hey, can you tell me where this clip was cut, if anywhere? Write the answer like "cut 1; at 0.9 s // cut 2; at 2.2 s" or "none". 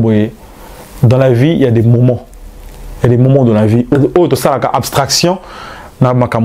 cut 1; at 4.0 s